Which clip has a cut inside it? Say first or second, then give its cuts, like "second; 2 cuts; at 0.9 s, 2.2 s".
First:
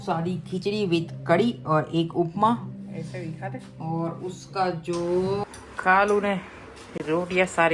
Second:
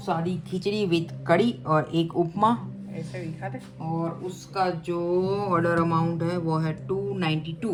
first; 1 cut; at 5.4 s